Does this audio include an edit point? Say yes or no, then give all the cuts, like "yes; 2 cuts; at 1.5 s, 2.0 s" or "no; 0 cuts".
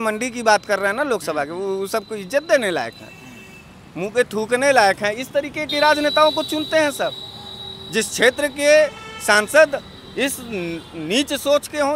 no; 0 cuts